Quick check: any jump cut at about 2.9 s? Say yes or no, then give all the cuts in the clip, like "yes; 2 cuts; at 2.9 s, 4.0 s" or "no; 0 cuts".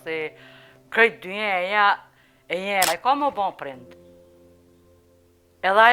yes; 1 cut; at 2.9 s